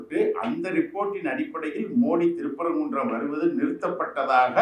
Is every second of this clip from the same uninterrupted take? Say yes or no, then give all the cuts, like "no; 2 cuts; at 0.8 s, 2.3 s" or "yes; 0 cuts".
yes; 0 cuts